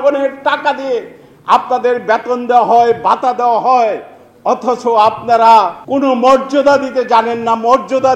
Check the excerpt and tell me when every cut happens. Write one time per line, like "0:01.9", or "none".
0:05.8